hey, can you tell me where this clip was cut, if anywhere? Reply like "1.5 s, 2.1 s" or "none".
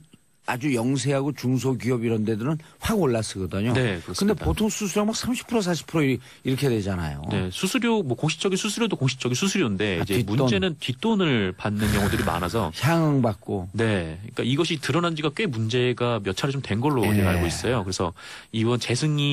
7.6 s